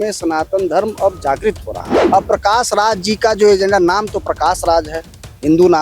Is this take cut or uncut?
cut